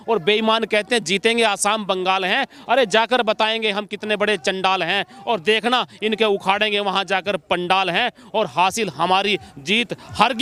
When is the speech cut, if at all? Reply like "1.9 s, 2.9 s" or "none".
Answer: none